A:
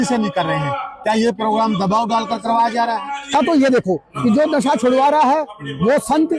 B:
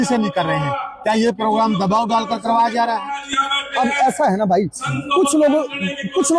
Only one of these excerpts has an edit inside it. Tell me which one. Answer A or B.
A